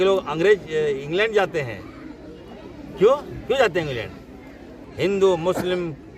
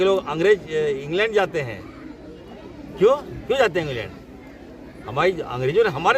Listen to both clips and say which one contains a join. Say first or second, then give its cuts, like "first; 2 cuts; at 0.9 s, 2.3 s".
first; 1 cut; at 4.8 s